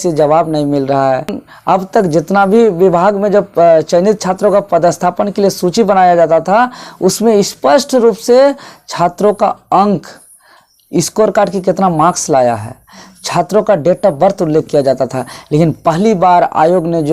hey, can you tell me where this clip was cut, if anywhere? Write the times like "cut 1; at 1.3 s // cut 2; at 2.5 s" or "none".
none

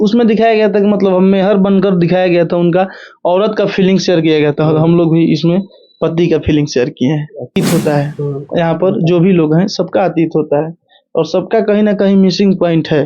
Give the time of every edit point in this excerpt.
cut 1; at 7.6 s

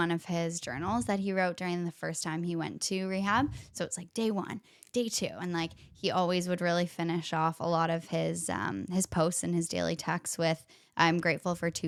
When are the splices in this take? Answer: none

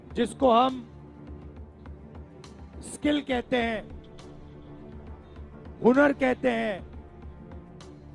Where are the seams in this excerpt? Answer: cut 1; at 0.9 s // cut 2; at 2.7 s // cut 3; at 6.8 s

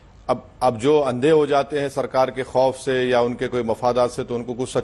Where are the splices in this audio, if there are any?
none

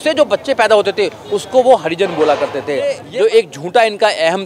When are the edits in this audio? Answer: cut 1; at 3.0 s

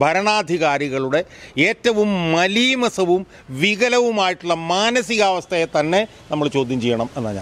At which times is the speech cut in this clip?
none

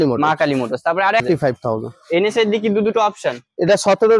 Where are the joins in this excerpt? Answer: cut 1; at 1.2 s

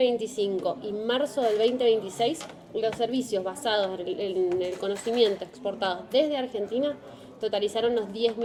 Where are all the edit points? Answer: none

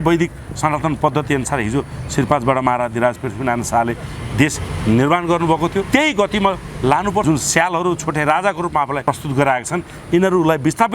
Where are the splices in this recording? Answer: cut 1; at 5.9 s // cut 2; at 7.2 s // cut 3; at 9.0 s

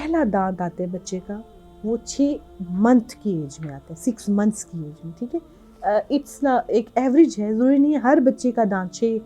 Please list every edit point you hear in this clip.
none

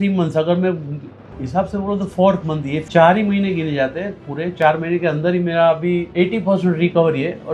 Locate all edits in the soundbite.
cut 1; at 2.8 s // cut 2; at 6.1 s

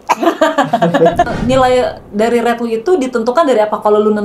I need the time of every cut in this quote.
cut 1; at 1.3 s

